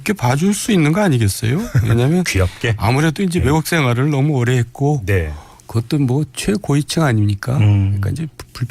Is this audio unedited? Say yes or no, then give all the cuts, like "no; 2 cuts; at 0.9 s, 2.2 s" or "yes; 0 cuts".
no; 1 cut; at 1.2 s